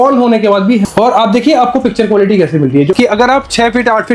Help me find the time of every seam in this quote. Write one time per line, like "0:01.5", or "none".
0:00.8
0:02.9